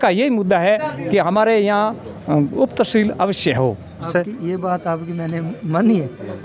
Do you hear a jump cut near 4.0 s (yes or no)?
yes